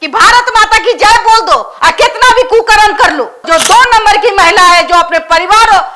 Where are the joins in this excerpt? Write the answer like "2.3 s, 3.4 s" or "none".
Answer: 3.5 s